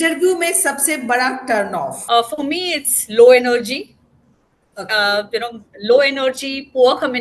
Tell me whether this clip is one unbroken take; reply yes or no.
no